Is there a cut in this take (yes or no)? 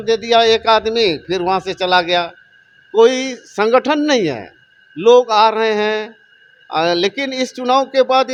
no